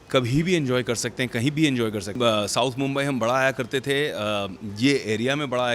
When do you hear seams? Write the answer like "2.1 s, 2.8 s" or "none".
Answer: 2.2 s